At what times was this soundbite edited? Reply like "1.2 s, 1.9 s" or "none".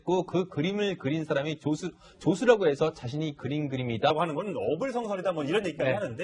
none